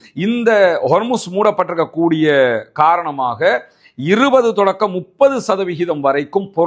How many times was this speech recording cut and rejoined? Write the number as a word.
zero